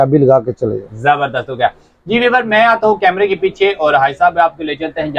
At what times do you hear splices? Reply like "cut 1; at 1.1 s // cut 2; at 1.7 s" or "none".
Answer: none